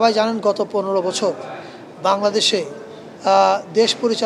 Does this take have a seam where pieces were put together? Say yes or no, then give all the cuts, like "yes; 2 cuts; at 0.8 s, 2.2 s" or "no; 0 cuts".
no; 0 cuts